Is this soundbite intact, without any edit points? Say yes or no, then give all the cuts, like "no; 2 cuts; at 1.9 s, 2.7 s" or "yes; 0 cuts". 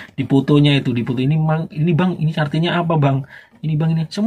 yes; 0 cuts